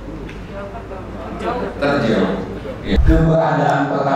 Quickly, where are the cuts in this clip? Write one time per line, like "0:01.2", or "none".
0:03.0